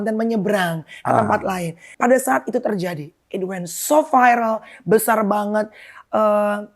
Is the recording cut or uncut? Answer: cut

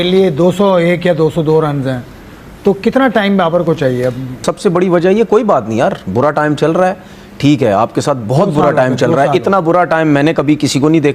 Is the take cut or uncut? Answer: cut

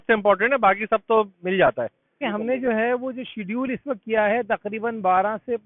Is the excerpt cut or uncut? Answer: cut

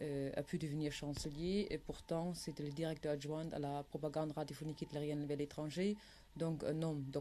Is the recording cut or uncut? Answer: cut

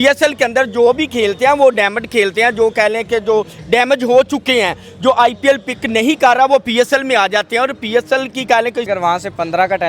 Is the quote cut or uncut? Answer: cut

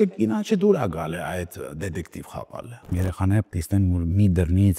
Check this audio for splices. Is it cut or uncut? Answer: cut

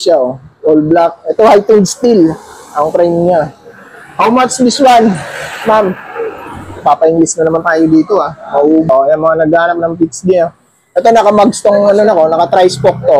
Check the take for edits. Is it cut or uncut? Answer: cut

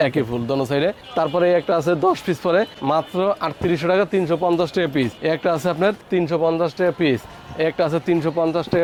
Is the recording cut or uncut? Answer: uncut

